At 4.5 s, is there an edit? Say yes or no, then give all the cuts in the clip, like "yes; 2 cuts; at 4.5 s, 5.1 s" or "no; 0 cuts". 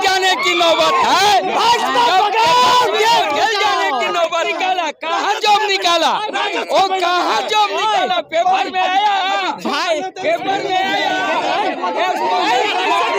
yes; 1 cut; at 4.5 s